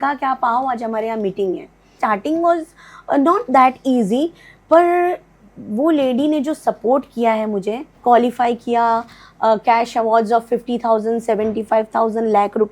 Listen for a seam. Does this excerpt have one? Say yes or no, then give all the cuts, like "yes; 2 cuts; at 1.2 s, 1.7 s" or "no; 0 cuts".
yes; 2 cuts; at 2.0 s, 7.9 s